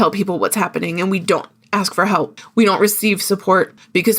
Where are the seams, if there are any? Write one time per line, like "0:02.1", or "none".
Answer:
0:02.3